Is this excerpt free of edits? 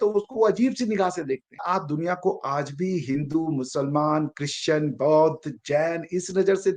no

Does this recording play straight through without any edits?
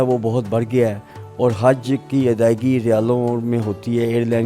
yes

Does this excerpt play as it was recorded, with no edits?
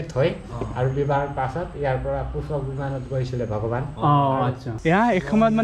no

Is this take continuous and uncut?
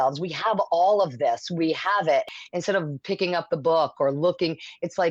no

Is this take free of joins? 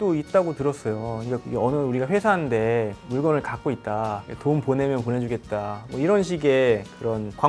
no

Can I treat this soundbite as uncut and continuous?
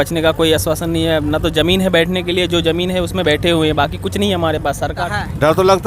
no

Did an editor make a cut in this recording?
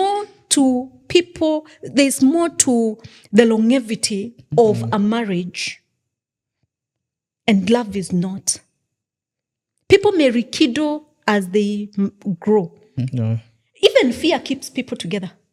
no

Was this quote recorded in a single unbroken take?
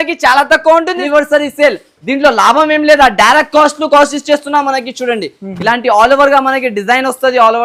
no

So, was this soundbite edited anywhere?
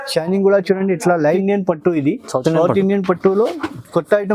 yes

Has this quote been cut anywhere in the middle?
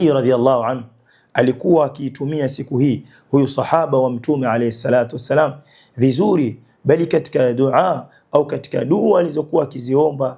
no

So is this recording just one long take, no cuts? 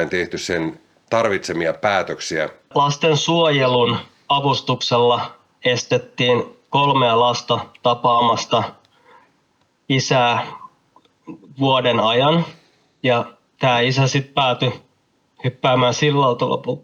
no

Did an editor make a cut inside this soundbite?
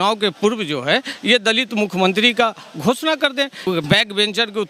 yes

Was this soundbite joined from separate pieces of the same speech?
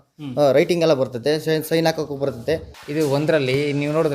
yes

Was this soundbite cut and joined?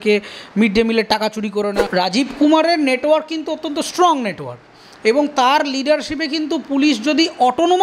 yes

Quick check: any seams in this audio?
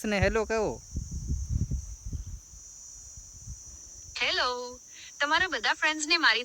no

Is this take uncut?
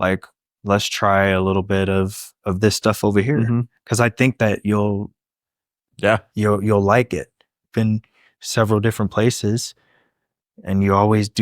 no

